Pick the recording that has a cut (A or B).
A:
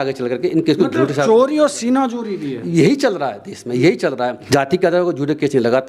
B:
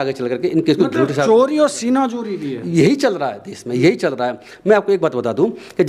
A